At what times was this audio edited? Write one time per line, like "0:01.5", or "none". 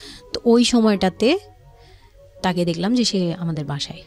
none